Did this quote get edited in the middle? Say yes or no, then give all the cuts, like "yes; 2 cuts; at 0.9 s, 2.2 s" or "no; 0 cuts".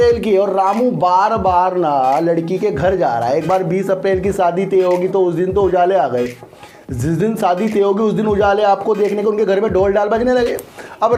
no; 0 cuts